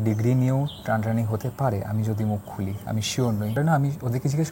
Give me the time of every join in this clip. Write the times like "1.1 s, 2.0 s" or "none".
3.6 s